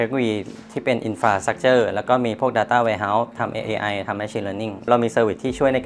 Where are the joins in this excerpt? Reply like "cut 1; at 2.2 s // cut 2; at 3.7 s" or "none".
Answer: cut 1; at 3.3 s // cut 2; at 4.9 s